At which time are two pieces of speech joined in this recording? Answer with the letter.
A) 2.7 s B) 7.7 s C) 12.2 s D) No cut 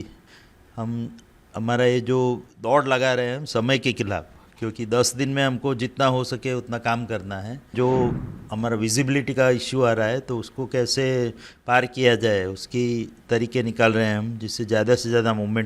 B